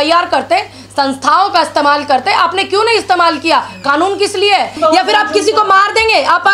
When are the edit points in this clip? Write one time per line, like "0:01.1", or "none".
0:04.7